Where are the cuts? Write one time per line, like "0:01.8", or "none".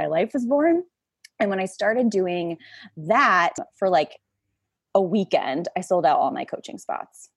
0:03.7

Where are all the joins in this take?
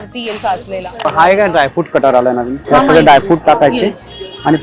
0:01.0
0:02.6

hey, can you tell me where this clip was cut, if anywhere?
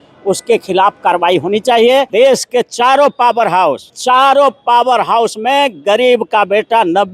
0:02.1
0:04.0

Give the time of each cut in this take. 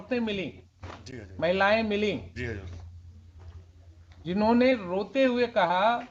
none

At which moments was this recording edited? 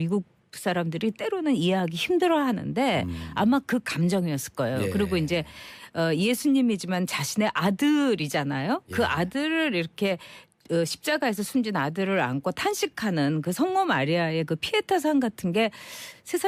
0:02.0

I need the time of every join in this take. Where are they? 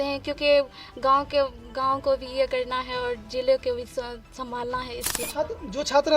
0:05.2

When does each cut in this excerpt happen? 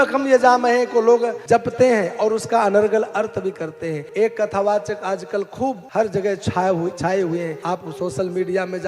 0:01.4
0:04.0
0:05.8
0:07.6

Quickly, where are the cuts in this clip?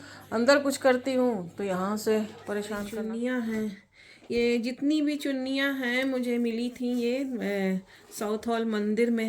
0:02.8

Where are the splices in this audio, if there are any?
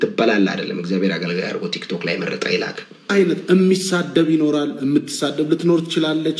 0:03.1

